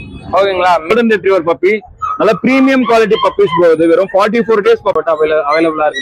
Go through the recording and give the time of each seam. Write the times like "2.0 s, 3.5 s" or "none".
0.9 s, 5.0 s